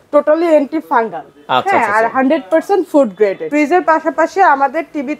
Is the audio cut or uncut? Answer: cut